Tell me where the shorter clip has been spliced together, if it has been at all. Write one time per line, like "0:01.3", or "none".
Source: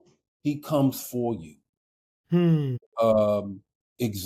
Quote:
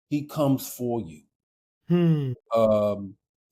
0:02.0

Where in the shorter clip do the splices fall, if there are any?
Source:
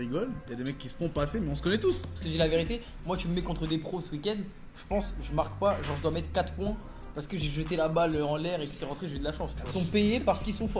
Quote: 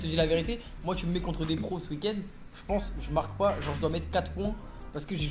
none

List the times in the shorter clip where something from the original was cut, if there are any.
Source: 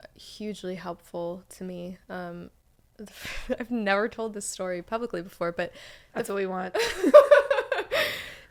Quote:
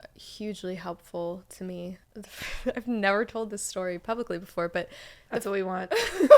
0:02.0

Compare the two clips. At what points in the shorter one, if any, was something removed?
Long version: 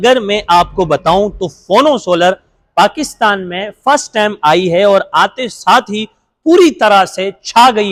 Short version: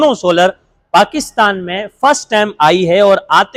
none

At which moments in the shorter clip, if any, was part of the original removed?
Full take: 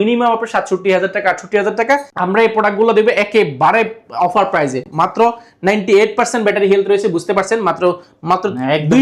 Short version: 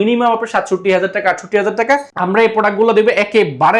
none

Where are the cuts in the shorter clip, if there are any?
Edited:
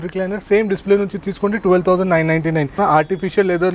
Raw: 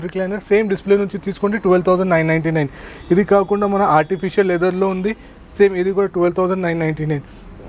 0:02.8

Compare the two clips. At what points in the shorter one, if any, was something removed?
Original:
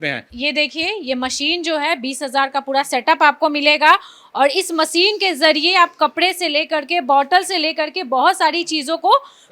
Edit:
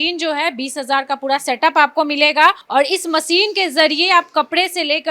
0:02.6

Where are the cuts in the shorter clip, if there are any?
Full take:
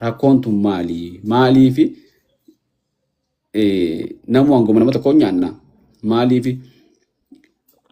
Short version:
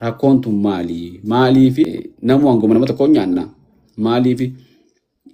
0:02.0

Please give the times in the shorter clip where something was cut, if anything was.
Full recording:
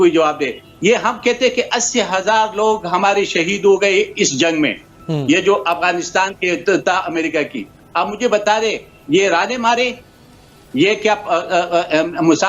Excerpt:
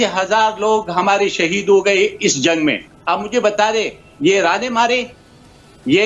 0:02.9

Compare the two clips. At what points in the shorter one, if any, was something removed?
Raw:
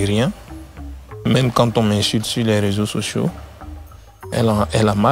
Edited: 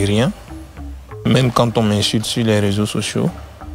none

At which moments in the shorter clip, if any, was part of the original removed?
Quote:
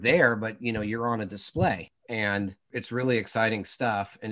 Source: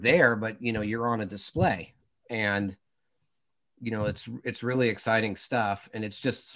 0:01.9
0:02.6

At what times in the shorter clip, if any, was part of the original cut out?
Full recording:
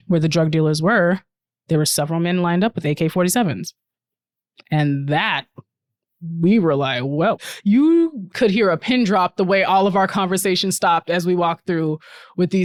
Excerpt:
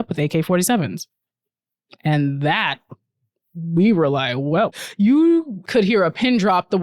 none

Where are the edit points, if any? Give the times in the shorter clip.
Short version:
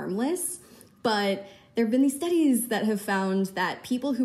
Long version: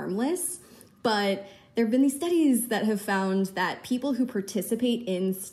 none

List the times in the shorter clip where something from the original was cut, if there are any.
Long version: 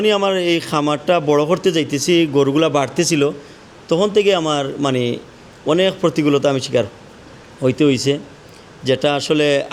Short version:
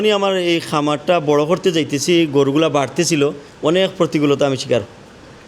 0:03.5

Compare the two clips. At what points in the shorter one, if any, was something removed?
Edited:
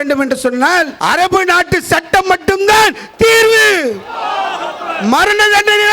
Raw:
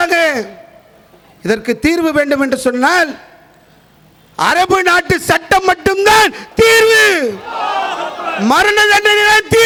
0:00.9

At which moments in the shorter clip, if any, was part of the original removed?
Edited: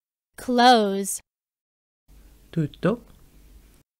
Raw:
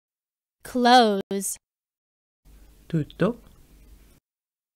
0:00.9

